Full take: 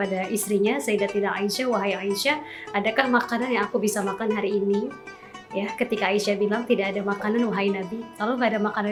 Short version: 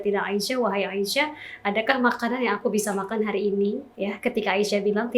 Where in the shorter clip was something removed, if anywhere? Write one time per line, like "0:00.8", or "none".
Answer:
0:03.9